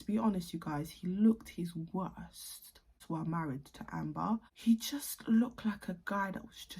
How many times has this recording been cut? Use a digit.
2